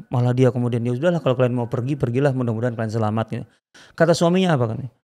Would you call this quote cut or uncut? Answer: uncut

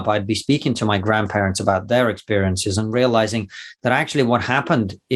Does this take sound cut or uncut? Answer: uncut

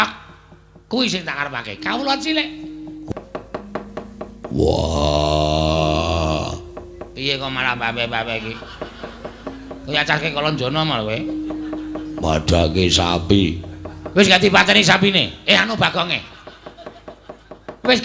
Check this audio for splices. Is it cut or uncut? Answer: cut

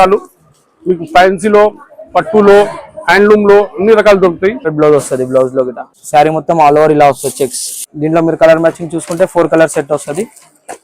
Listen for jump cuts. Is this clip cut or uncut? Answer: cut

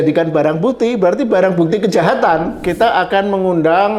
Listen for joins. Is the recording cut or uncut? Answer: cut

